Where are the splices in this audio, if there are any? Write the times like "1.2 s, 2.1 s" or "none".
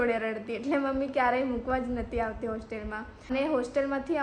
3.3 s